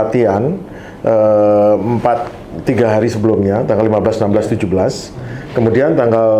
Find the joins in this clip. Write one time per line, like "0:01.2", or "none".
none